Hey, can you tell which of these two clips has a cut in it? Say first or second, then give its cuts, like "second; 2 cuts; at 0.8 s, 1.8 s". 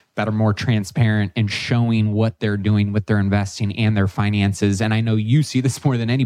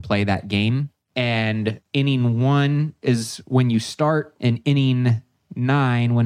second; 3 cuts; at 1.0 s, 1.8 s, 4.3 s